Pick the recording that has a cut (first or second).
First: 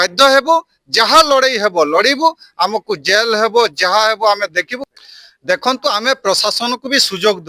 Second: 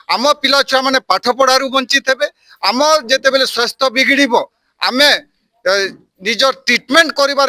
first